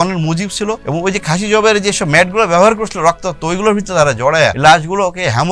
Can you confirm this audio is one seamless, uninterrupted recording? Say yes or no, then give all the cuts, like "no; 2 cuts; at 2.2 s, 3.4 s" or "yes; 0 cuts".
no; 2 cuts; at 0.8 s, 4.6 s